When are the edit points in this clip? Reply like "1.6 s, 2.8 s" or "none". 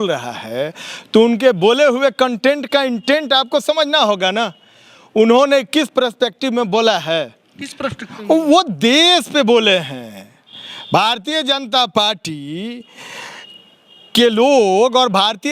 none